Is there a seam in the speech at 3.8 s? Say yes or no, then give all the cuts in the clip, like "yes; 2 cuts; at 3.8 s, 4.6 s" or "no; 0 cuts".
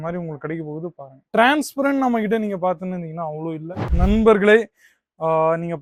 yes; 1 cut; at 3.8 s